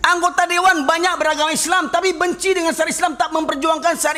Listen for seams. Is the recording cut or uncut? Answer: uncut